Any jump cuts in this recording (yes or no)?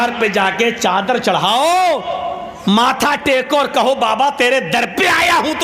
no